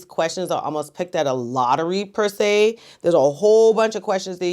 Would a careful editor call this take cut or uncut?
uncut